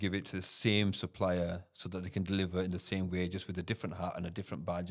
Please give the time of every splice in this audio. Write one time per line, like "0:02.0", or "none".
none